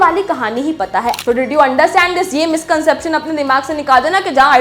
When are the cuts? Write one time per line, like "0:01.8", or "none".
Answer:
0:01.2